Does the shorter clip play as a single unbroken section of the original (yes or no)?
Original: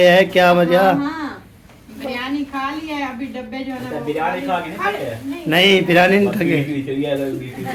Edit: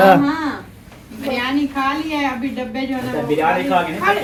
yes